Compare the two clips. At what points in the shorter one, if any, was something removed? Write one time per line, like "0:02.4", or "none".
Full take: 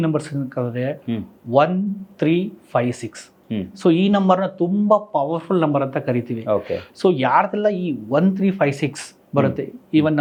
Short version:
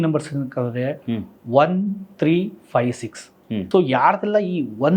0:03.6